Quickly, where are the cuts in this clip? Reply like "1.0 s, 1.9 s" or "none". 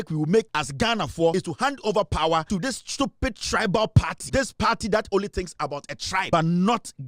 1.1 s, 2.5 s, 4.2 s, 6.3 s